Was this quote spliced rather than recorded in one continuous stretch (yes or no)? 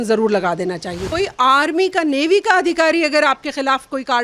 yes